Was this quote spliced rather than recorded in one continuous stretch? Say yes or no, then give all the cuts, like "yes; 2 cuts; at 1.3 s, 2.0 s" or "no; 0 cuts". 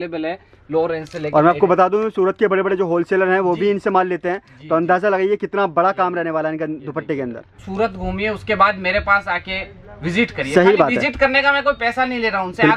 yes; 1 cut; at 7.6 s